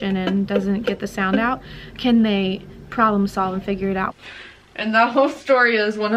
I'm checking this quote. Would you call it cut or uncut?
cut